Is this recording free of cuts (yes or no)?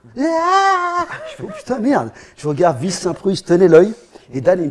yes